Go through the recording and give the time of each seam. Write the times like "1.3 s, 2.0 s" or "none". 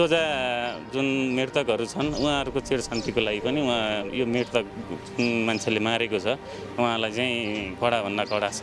none